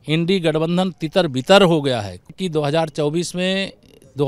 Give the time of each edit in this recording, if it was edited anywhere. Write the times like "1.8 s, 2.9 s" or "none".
2.3 s